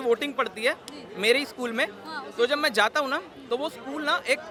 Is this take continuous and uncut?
yes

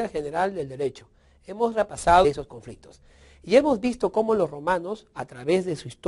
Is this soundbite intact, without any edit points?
yes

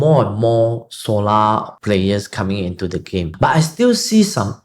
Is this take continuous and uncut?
no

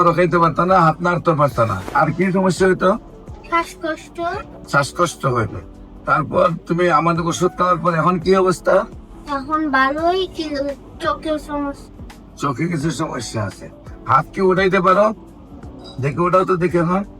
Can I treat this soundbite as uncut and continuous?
no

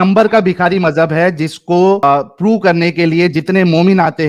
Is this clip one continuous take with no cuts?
yes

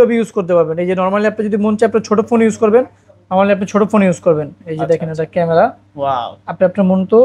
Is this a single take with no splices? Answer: yes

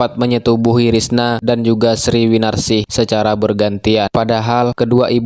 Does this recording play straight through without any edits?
yes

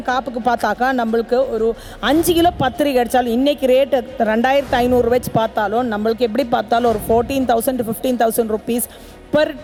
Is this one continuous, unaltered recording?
yes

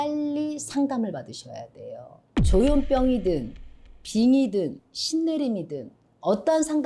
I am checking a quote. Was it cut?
no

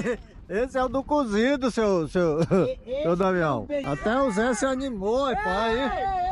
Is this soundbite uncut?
no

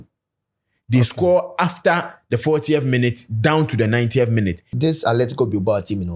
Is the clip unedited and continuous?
no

